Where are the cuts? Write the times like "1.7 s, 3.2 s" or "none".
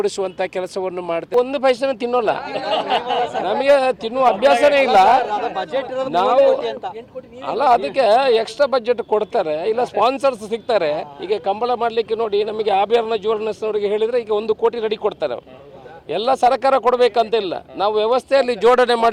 1.3 s

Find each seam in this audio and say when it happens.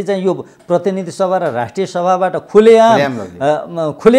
none

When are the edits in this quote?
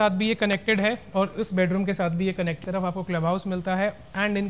2.6 s

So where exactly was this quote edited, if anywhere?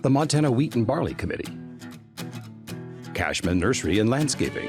1.5 s, 3.1 s

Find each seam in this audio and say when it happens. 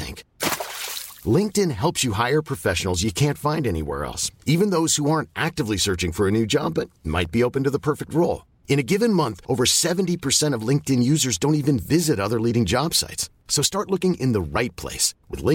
none

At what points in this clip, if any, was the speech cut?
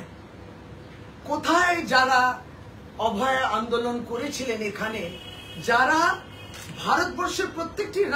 none

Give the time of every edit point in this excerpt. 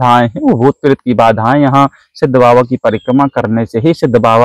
none

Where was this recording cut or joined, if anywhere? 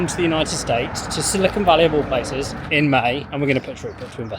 2.6 s, 3.3 s

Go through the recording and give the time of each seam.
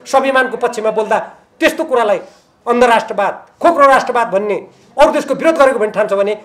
none

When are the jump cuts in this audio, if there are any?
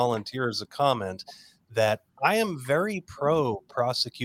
none

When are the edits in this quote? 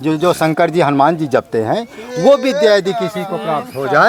none

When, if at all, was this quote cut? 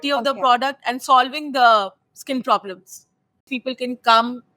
3.5 s

